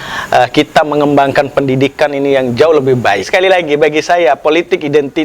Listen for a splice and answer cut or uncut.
cut